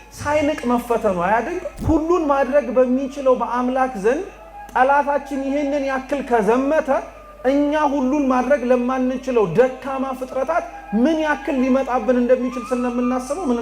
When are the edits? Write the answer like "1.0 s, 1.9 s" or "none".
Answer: 1.7 s